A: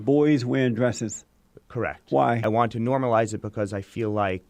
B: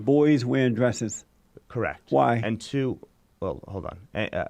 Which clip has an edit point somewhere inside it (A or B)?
A